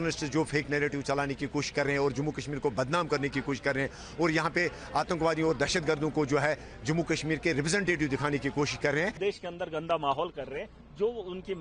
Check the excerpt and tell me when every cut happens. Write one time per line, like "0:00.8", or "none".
0:09.2